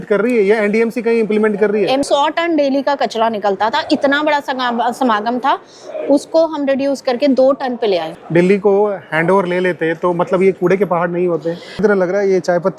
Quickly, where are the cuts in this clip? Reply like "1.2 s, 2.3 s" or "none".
2.0 s, 8.1 s, 11.8 s